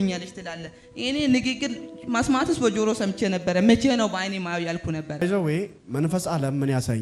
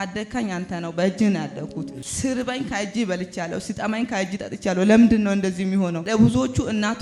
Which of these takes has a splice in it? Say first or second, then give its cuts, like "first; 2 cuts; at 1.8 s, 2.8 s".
second; 2 cuts; at 2.0 s, 6.0 s